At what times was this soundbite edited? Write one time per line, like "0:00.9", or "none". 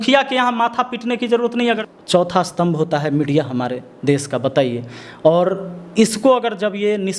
0:01.8